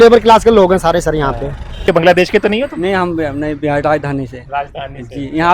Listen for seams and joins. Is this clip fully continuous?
no; 1 cut; at 1.8 s

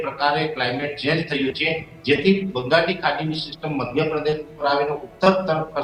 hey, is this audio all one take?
yes; 0 cuts

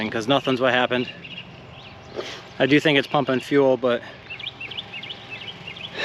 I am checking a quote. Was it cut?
no; 0 cuts

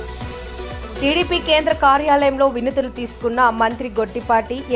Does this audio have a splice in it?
yes; 1 cut; at 1.0 s

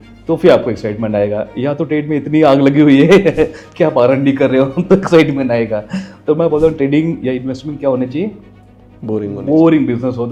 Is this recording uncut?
yes; 0 cuts

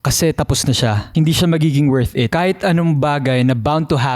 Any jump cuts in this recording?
yes; 2 cuts; at 1.0 s, 2.3 s

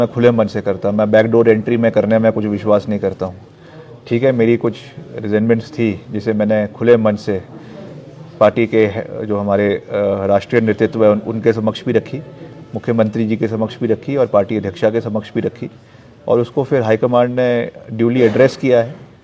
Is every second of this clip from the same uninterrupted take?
yes; 0 cuts

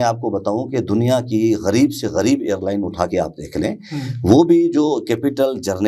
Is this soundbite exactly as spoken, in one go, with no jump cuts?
yes; 0 cuts

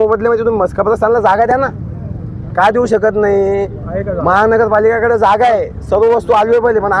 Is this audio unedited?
yes; 0 cuts

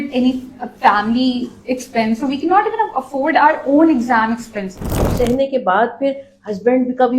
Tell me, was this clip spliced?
yes; 1 cut; at 5.1 s

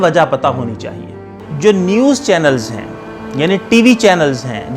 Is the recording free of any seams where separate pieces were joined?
no; 1 cut; at 1.5 s

